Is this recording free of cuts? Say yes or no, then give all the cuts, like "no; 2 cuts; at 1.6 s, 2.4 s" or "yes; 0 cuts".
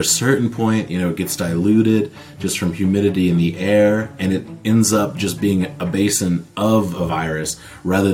yes; 0 cuts